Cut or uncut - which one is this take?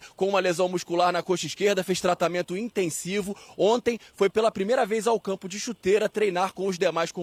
uncut